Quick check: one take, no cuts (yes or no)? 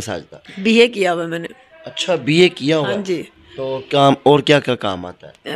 yes